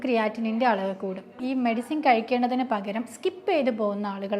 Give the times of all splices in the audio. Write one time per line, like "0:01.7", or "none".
0:01.4